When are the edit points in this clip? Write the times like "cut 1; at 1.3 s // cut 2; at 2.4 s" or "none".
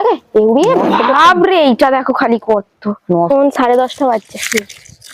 cut 1; at 3.3 s